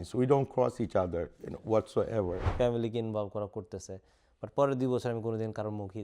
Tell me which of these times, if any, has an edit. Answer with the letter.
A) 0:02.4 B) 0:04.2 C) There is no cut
A